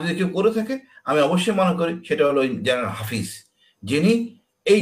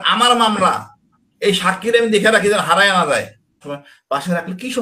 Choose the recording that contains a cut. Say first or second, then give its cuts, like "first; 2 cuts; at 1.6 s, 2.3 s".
second; 1 cut; at 3.7 s